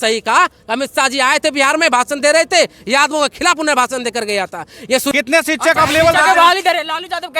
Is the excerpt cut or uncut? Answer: cut